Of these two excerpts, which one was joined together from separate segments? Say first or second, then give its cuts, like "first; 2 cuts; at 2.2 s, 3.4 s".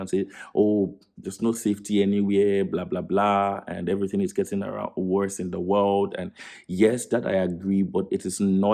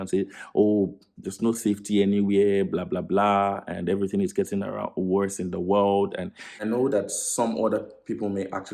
second; 1 cut; at 6.5 s